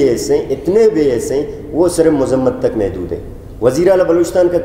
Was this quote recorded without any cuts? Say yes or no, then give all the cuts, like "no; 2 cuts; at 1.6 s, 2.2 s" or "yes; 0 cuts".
yes; 0 cuts